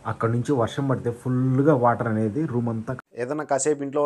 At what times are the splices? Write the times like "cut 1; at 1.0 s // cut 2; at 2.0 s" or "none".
cut 1; at 2.9 s